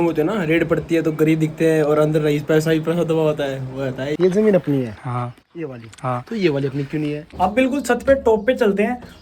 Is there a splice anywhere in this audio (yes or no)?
yes